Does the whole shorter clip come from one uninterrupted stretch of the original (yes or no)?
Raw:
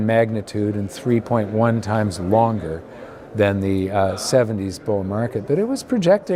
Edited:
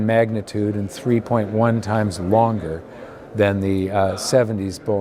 yes